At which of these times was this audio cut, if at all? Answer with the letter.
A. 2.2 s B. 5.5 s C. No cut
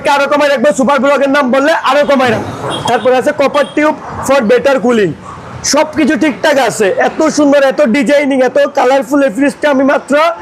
A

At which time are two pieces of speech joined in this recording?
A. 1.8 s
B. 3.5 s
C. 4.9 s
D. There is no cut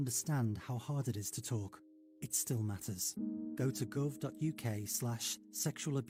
D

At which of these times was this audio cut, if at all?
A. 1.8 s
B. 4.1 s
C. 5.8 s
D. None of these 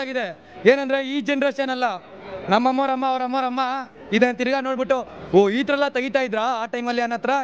D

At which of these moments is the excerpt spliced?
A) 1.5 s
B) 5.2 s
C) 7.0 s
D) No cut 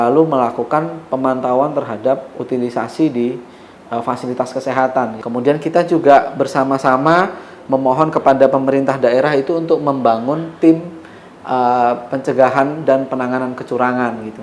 B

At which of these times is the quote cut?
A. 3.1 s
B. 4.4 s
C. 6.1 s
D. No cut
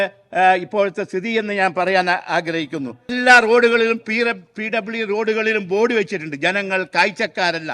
A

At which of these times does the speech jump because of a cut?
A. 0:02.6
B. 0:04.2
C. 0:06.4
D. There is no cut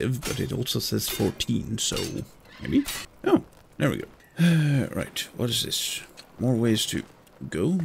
D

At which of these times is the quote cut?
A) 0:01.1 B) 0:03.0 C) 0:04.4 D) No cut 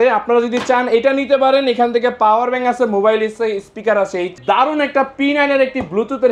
C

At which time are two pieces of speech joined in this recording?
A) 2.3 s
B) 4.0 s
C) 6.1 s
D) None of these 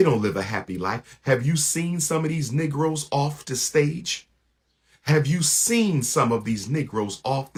D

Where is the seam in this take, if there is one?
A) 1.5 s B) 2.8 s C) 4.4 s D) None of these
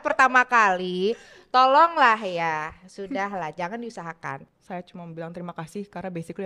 C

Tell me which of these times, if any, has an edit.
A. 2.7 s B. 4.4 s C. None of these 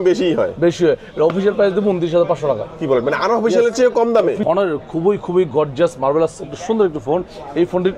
B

